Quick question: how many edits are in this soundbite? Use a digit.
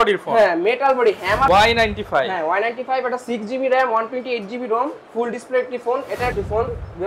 2